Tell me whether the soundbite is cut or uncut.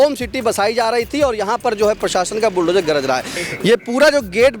cut